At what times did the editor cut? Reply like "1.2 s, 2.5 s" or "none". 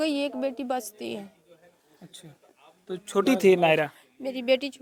none